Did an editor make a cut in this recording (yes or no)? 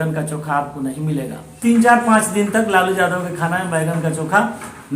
yes